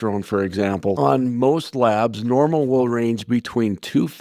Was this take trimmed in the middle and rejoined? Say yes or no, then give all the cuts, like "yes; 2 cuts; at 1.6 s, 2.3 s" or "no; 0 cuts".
yes; 1 cut; at 1.0 s